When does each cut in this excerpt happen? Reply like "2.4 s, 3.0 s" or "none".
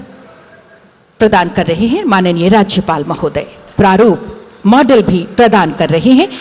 3.6 s